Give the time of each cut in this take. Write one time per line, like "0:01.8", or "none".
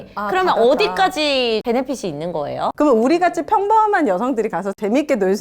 0:01.6
0:02.7